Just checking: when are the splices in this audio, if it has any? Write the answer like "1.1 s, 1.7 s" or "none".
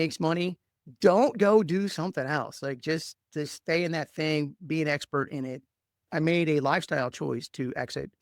6.1 s